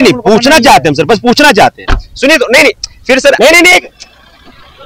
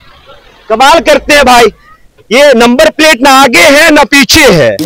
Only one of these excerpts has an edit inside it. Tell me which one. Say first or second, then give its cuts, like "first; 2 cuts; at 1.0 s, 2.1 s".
first; 1 cut; at 3.4 s